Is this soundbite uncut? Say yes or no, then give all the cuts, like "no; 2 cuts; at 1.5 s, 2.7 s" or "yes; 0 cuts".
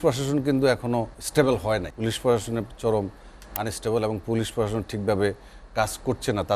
no; 2 cuts; at 1.2 s, 1.9 s